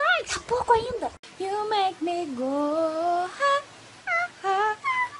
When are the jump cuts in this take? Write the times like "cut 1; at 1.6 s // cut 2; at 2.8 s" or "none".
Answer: cut 1; at 1.3 s